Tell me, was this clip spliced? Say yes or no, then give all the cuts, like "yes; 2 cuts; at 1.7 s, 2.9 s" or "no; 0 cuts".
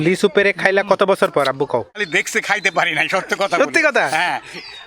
yes; 1 cut; at 2.0 s